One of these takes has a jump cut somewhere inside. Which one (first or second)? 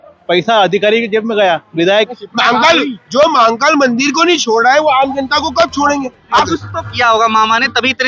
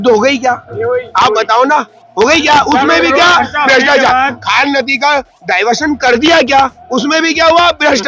first